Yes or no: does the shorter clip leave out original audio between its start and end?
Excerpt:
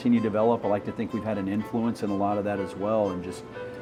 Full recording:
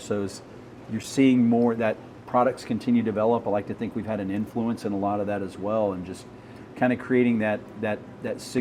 no